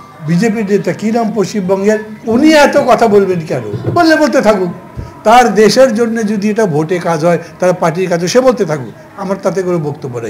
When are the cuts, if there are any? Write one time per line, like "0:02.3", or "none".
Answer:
0:02.1